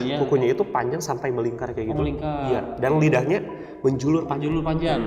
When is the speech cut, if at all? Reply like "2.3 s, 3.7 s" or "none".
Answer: none